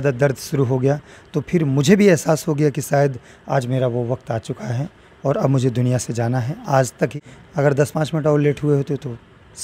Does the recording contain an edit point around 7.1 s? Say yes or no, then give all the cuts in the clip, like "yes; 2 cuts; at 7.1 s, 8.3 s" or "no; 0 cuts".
yes; 1 cut; at 7.1 s